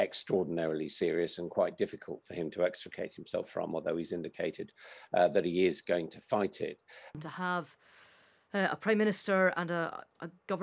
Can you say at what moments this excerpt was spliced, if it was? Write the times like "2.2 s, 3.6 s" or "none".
7.1 s